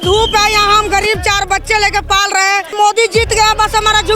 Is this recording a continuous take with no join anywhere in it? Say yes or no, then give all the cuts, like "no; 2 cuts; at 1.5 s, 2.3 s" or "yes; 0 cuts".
no; 1 cut; at 2.7 s